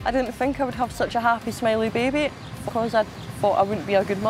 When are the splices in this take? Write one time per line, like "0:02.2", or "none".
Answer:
0:02.4